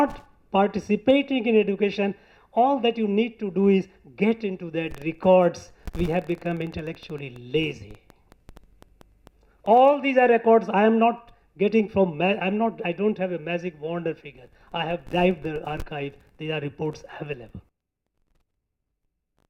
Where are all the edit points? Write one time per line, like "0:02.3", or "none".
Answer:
none